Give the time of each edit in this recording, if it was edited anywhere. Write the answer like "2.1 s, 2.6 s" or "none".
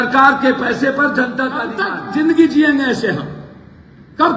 2.0 s